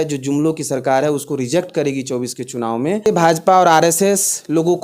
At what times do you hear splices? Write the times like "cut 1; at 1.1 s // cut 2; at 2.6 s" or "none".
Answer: cut 1; at 3.1 s